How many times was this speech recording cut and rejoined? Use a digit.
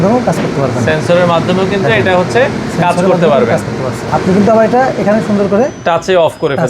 2